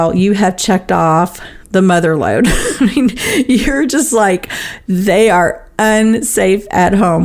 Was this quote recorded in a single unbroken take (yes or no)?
yes